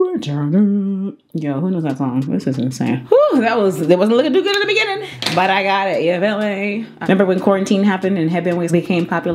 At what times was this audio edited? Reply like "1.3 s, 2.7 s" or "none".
3.0 s, 6.9 s